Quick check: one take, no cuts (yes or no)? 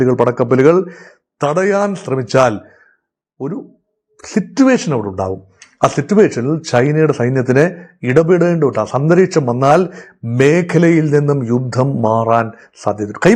yes